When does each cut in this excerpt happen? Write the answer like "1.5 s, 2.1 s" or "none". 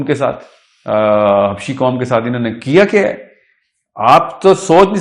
none